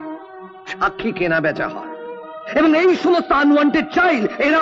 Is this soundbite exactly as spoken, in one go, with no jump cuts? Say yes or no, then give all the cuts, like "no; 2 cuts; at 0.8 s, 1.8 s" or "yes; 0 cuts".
yes; 0 cuts